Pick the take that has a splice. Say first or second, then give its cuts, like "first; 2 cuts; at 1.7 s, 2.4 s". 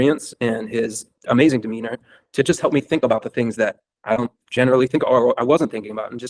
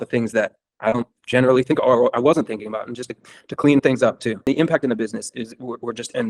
second; 1 cut; at 4.5 s